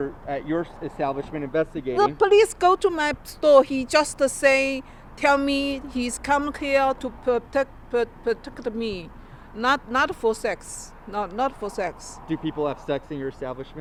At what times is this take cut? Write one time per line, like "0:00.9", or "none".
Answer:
none